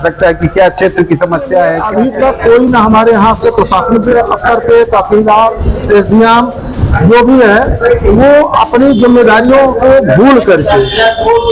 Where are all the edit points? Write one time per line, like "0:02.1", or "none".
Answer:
0:01.8